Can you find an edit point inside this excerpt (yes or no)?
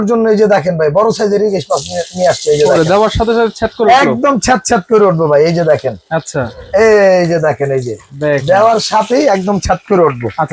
no